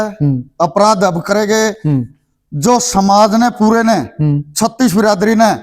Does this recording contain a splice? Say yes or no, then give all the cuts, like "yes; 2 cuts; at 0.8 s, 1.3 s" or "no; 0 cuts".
no; 0 cuts